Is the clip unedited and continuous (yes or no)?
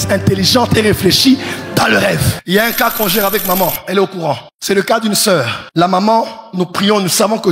no